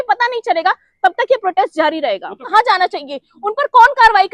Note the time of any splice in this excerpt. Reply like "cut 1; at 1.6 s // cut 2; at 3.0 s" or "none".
cut 1; at 2.4 s